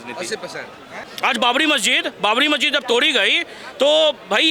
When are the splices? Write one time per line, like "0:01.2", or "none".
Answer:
0:01.1